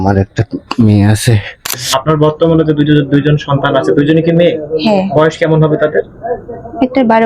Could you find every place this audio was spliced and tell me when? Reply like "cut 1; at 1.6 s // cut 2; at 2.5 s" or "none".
cut 1; at 1.9 s